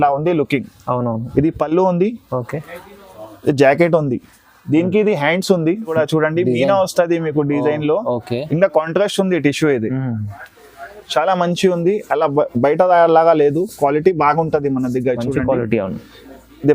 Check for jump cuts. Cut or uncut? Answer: cut